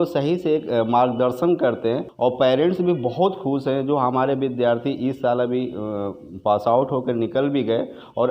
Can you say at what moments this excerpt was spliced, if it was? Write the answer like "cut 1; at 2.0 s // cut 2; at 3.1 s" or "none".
cut 1; at 2.1 s